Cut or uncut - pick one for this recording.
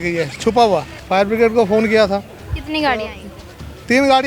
cut